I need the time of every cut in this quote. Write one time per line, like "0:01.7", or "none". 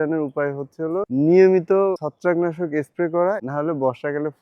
0:03.5